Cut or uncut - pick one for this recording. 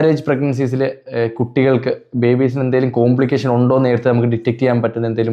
uncut